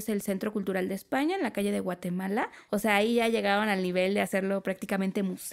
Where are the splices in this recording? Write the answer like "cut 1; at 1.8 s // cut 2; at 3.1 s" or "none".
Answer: cut 1; at 2.6 s